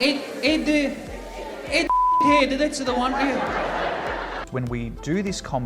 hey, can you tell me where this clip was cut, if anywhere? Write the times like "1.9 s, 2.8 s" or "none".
4.4 s